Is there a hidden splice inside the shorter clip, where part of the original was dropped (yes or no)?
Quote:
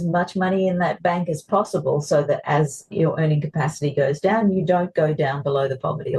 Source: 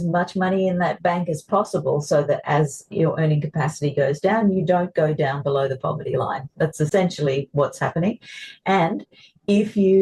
no